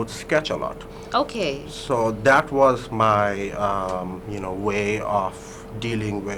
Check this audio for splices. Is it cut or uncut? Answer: uncut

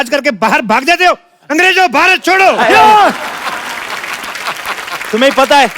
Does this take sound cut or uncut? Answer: uncut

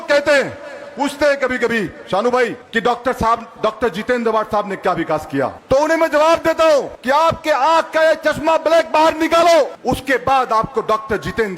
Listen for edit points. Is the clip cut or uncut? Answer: cut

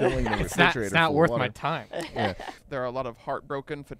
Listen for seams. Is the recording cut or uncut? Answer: cut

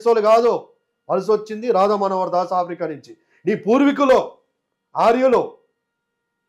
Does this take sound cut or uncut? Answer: uncut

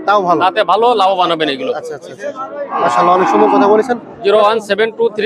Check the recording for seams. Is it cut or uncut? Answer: uncut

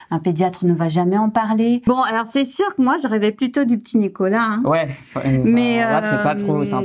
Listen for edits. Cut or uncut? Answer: cut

